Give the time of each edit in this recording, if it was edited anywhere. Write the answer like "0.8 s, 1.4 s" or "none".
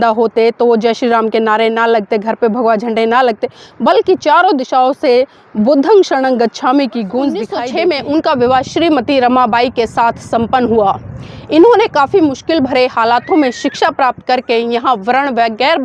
7.6 s